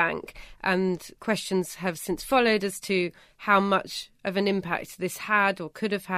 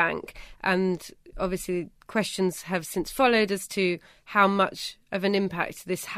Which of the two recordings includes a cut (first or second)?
first